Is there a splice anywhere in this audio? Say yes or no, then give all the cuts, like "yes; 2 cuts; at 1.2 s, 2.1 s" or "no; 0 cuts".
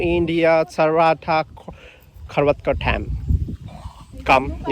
no; 0 cuts